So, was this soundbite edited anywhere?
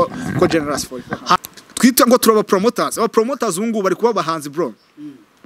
yes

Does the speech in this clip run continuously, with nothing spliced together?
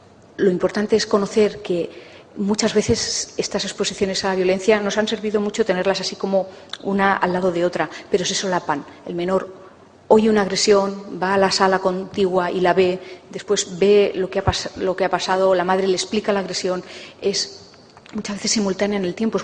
no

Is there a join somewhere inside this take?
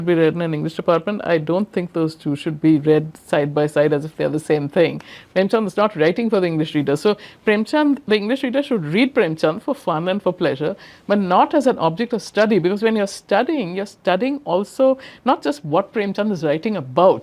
no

